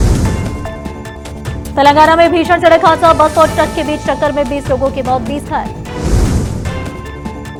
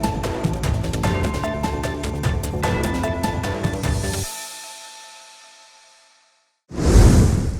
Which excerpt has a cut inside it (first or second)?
second